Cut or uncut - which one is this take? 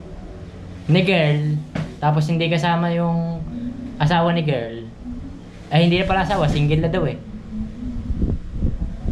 uncut